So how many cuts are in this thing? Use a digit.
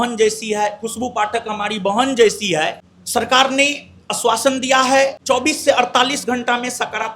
2